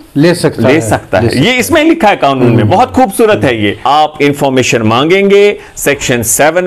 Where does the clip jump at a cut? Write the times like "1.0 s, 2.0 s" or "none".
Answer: 3.8 s